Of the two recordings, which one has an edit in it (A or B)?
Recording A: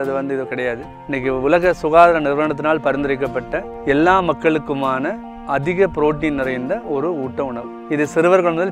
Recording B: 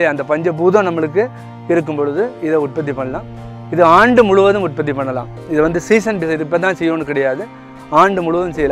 A